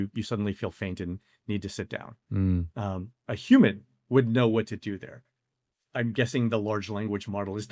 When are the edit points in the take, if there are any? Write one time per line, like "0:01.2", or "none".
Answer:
none